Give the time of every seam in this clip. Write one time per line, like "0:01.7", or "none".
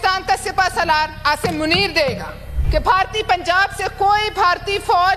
0:02.6

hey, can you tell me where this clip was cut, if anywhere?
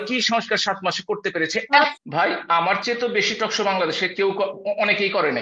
none

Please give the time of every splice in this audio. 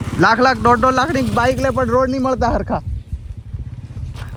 none

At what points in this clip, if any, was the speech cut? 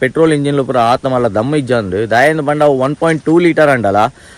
none

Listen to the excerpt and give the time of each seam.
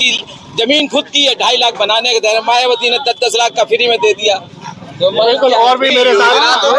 none

